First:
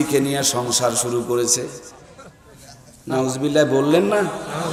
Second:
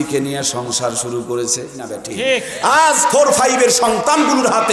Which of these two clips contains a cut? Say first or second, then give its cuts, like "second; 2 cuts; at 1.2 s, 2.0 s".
second; 1 cut; at 2.0 s